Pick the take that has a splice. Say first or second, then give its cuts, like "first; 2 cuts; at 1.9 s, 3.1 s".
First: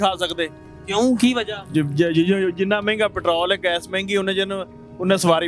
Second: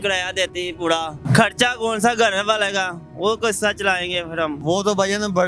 second; 2 cuts; at 1.2 s, 4.6 s